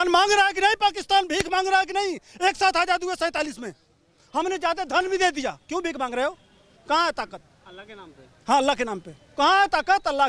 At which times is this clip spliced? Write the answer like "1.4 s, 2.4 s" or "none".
none